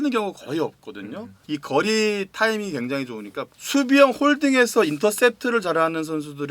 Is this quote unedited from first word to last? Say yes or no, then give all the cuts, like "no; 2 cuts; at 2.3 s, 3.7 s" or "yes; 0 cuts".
no; 2 cuts; at 1.3 s, 3.5 s